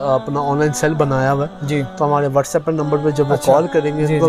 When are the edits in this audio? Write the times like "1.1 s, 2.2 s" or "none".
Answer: none